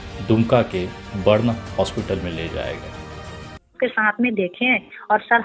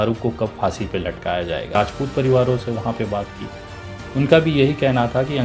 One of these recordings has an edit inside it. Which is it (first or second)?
second